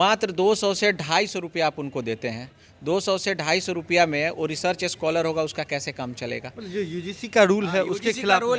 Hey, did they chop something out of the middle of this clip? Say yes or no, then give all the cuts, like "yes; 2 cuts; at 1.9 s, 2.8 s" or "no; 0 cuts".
no; 0 cuts